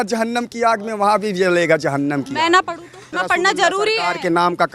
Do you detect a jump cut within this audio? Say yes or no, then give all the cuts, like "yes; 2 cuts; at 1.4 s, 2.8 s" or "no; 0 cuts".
yes; 1 cut; at 3.0 s